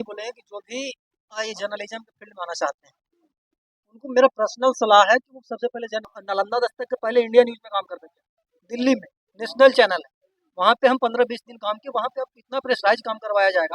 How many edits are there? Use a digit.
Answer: 1